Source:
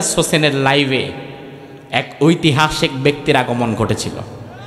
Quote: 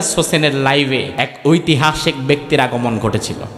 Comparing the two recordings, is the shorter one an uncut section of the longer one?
no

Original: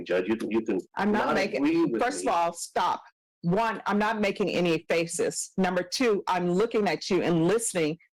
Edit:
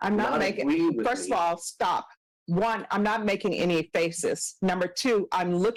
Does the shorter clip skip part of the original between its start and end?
no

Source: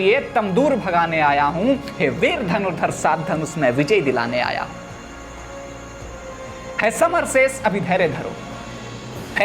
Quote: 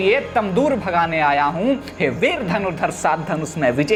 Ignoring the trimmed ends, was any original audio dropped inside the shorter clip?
no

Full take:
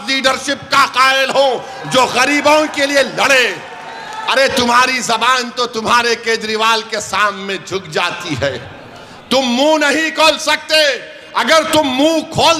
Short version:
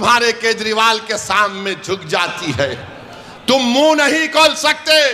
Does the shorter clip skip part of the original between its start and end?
no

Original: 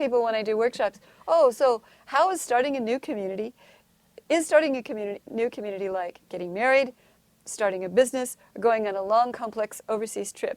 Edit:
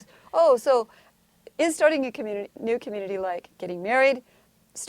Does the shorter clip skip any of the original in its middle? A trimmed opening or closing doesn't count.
yes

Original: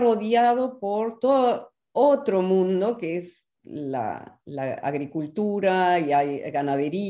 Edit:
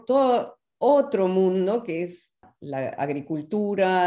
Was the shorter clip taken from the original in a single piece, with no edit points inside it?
no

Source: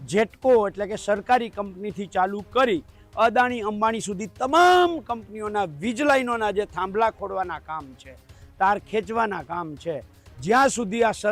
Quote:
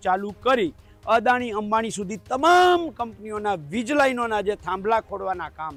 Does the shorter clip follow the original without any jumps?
yes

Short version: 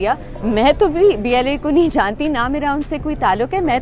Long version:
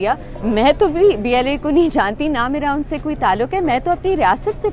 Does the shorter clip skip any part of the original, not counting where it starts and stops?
no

